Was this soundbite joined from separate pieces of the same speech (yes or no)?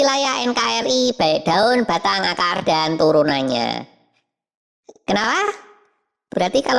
no